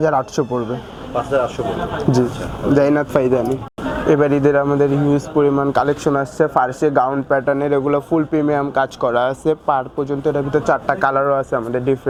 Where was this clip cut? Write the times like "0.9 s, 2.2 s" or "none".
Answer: none